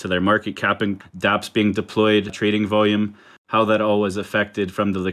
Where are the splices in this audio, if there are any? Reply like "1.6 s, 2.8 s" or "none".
1.1 s